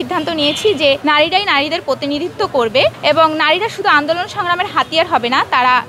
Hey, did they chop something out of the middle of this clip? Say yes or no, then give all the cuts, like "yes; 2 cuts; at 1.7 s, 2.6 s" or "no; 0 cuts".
yes; 2 cuts; at 1.0 s, 3.0 s